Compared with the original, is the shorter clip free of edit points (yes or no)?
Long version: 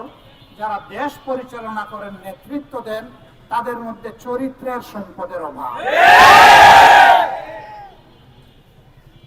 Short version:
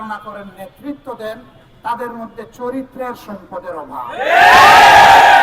yes